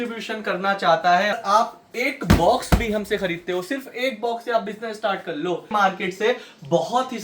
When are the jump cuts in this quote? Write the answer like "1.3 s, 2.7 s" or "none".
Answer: 1.4 s, 5.7 s